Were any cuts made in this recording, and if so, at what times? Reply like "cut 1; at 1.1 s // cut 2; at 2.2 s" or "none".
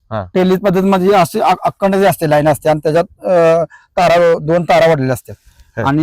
none